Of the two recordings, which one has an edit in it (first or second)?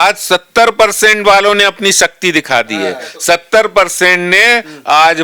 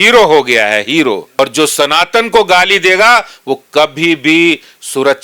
second